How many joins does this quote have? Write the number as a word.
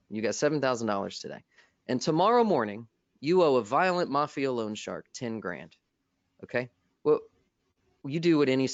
zero